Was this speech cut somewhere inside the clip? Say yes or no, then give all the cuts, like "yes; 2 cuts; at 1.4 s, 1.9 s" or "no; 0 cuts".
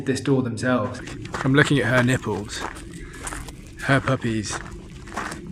yes; 1 cut; at 1.0 s